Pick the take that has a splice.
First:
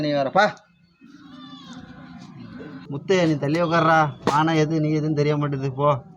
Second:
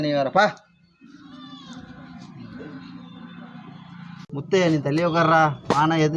first; 1 cut; at 2.9 s

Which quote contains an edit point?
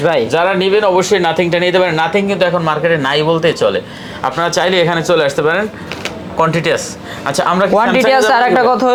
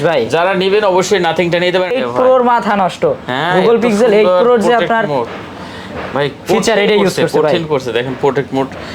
second; 1 cut; at 1.9 s

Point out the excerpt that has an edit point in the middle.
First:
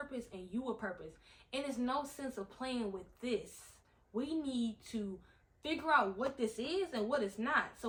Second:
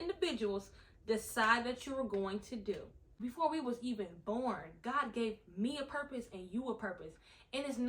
second; 1 cut; at 3.1 s

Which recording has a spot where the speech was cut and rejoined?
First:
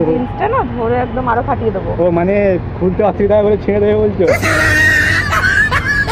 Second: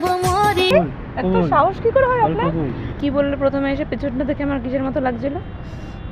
second; 1 cut; at 2.9 s

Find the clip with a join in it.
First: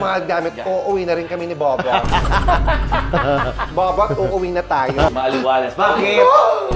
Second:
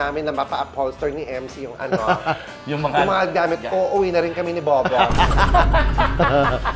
first; 1 cut; at 5.1 s

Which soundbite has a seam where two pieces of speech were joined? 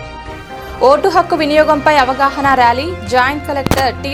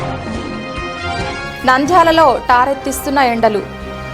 second; 1 cut; at 1.2 s

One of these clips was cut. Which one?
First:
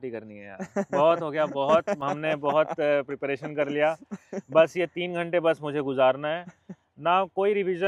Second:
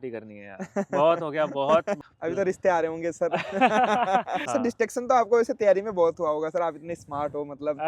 second; 2 cuts; at 2.0 s, 4.4 s

